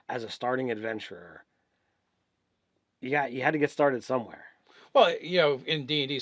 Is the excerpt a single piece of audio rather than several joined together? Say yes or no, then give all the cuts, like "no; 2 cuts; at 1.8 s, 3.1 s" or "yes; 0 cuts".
yes; 0 cuts